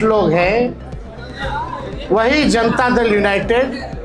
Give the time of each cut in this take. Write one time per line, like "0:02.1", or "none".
none